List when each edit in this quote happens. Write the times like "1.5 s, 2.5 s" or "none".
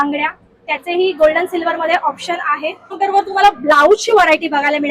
3.0 s